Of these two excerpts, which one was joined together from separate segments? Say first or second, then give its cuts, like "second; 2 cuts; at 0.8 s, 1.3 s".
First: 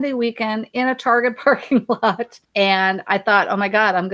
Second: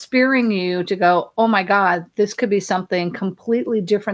first; 1 cut; at 2.3 s